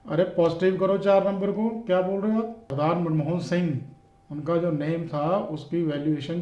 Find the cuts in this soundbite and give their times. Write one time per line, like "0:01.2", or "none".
0:02.6